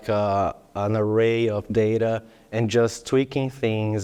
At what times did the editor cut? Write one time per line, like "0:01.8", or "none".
none